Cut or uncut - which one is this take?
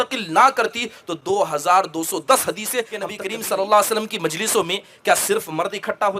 cut